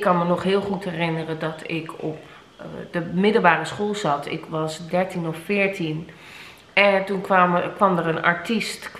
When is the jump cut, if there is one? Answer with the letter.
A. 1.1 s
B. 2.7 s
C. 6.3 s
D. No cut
D